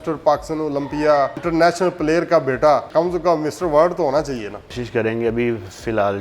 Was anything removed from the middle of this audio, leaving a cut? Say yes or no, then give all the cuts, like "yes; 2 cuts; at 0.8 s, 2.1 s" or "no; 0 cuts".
yes; 3 cuts; at 1.4 s, 2.9 s, 4.8 s